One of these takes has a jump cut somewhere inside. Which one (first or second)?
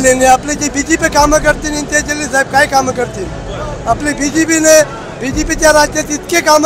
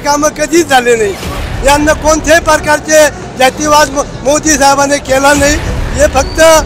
second